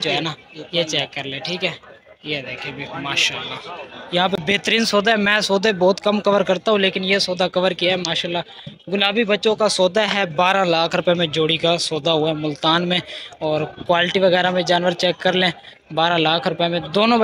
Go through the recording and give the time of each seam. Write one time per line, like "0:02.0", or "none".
none